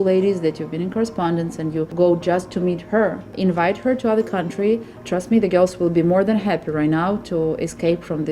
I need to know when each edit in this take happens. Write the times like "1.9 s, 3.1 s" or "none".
1.9 s, 3.3 s, 4.9 s